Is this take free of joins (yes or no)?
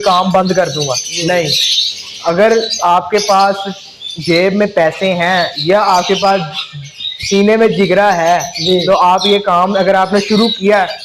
yes